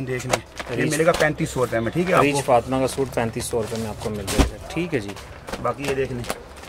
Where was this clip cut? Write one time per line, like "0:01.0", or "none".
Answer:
none